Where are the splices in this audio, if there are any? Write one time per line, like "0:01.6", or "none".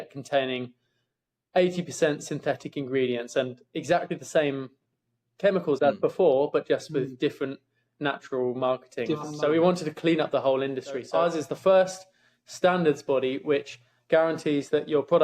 0:09.3
0:11.1